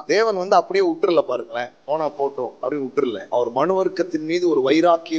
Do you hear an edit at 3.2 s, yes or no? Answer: yes